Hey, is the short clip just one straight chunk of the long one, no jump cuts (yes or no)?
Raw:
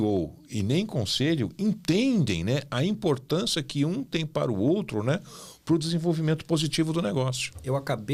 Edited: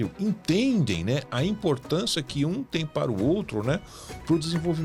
yes